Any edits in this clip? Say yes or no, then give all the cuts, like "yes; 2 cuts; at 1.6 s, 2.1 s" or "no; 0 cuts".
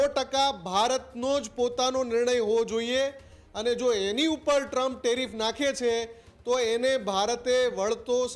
no; 0 cuts